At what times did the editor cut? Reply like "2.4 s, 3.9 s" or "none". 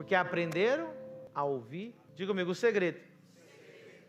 1.2 s, 2.0 s